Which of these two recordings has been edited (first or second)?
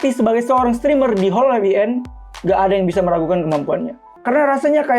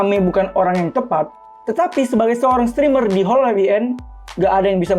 first